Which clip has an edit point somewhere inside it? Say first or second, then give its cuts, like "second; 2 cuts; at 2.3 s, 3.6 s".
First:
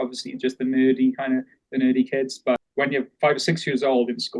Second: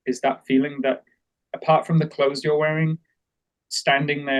first; 1 cut; at 2.7 s